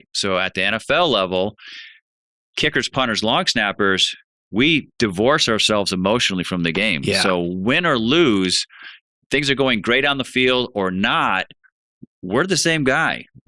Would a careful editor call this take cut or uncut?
uncut